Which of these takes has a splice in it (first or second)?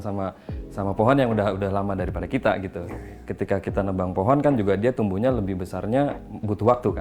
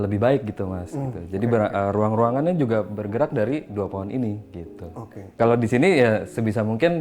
second